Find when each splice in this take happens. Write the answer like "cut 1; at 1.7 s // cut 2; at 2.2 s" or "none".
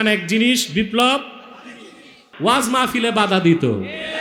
cut 1; at 2.2 s